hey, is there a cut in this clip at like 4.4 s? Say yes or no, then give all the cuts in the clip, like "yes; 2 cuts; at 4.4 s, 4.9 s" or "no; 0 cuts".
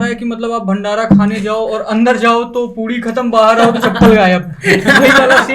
no; 0 cuts